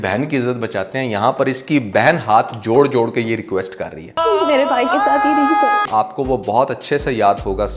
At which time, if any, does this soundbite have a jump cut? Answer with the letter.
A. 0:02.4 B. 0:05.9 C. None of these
B